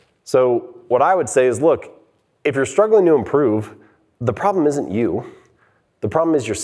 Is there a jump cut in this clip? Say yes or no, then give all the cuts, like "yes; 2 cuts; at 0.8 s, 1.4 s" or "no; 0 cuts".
no; 0 cuts